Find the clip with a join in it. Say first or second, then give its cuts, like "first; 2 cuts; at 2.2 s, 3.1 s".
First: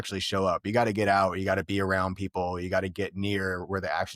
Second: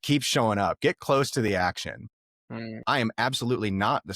second; 1 cut; at 2.7 s